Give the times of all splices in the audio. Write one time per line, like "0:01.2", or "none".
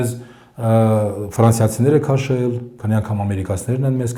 none